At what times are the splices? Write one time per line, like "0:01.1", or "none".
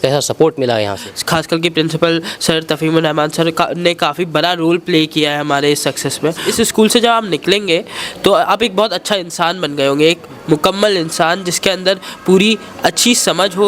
0:01.0
0:06.4